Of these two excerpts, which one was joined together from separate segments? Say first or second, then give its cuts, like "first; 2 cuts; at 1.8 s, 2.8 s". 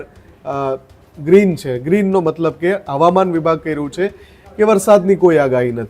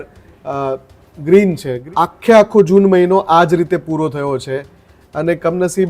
second; 1 cut; at 1.7 s